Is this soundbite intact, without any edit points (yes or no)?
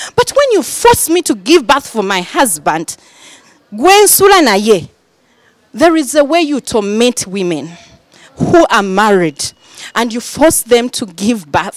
yes